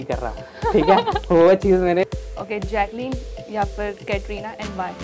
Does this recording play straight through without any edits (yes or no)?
no